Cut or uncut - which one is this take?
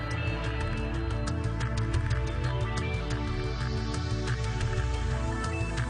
uncut